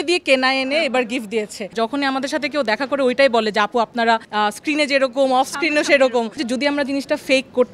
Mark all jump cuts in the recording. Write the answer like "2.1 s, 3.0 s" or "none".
1.7 s, 4.3 s, 6.4 s